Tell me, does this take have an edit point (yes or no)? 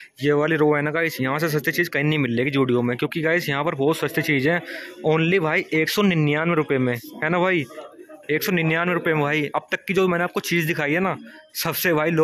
no